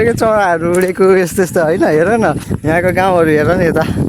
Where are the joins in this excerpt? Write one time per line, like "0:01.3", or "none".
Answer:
0:02.5